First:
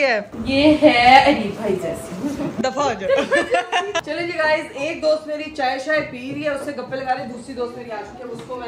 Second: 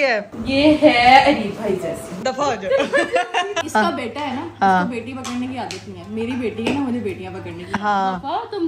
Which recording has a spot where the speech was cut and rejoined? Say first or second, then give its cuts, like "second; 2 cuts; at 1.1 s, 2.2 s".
second; 2 cuts; at 2.2 s, 3.6 s